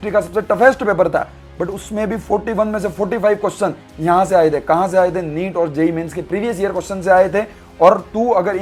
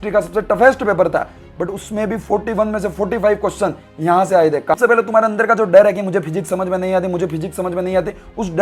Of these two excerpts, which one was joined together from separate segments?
second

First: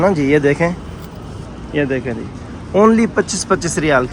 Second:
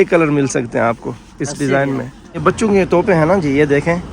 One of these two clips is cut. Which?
second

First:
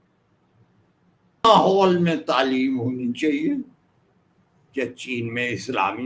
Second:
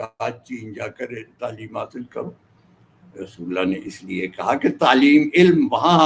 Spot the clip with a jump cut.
first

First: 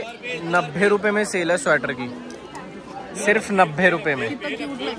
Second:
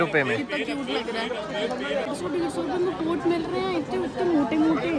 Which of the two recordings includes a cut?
second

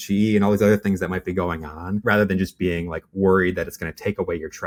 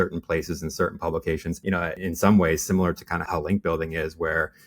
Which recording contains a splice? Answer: second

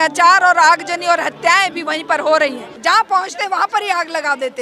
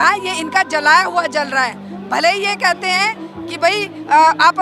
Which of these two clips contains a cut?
first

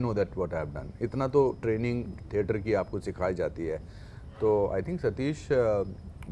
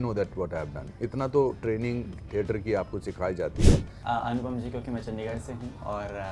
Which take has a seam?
second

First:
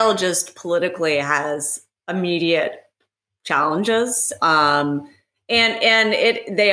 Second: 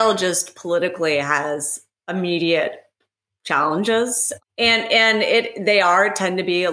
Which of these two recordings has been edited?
second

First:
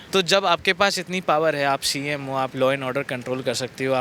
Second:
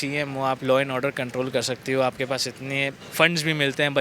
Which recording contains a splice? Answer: second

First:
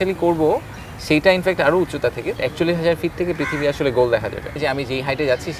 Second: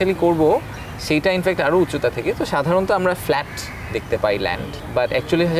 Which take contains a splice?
first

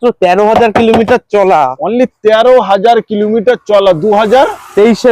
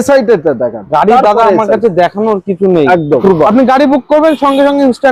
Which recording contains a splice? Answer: second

